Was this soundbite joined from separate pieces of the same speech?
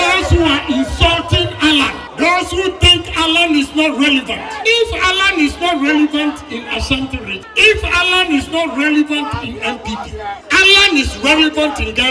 yes; 4 cuts; at 2.0 s, 4.5 s, 7.4 s, 10.4 s

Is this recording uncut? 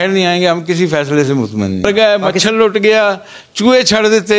no; 1 cut; at 1.8 s

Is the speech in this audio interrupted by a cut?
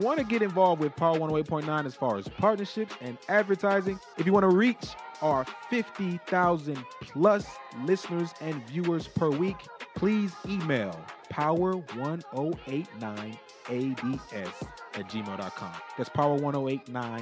no; 0 cuts

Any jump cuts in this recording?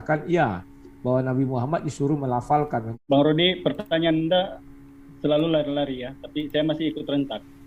yes; 1 cut; at 2.9 s

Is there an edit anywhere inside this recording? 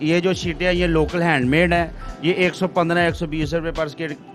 no; 0 cuts

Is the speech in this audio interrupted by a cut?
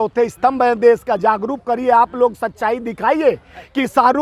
no; 0 cuts

